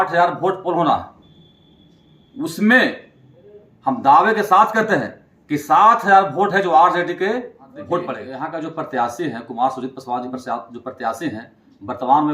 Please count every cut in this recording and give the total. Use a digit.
1